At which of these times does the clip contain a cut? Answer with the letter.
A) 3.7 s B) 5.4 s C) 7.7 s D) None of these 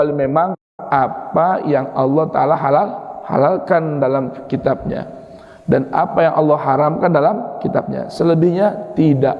D